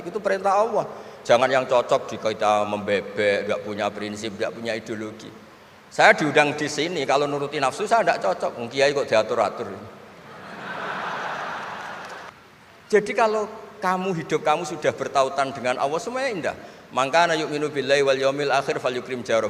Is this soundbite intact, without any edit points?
no; 1 cut; at 12.3 s

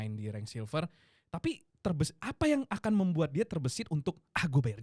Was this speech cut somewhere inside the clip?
no; 0 cuts

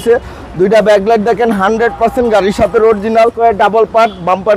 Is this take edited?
yes; 1 cut; at 3.3 s

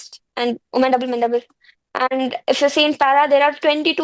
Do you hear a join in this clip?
no; 0 cuts

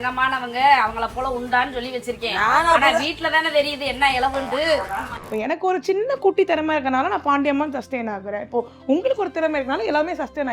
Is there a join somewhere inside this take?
yes; 1 cut; at 5.0 s

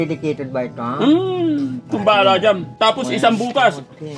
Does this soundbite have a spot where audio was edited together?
yes; 1 cut; at 2.7 s

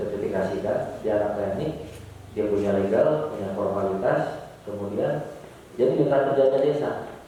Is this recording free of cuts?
yes; 0 cuts

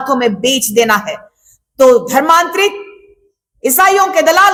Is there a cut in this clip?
no; 0 cuts

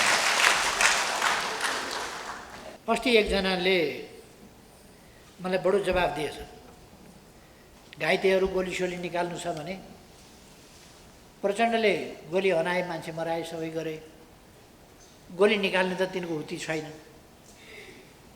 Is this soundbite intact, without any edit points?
no; 1 cut; at 2.7 s

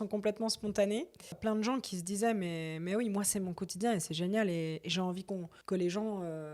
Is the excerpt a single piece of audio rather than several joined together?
no; 2 cuts; at 1.4 s, 5.5 s

